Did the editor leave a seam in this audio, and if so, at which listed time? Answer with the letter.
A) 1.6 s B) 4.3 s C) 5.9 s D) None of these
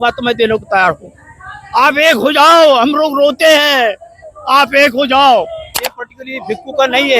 C